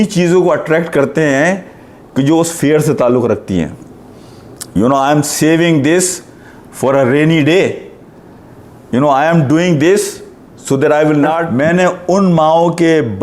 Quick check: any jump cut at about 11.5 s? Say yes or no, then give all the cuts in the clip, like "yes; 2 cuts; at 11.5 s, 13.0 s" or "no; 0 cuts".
yes; 1 cut; at 11.5 s